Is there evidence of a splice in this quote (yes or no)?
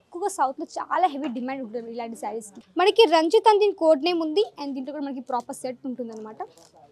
yes